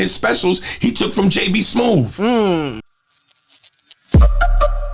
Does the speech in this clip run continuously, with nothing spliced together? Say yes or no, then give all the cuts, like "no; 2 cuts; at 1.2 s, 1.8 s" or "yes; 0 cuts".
no; 1 cut; at 2.8 s